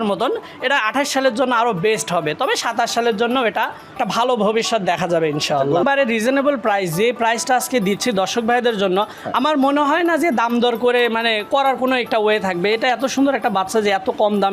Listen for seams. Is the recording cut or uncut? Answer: cut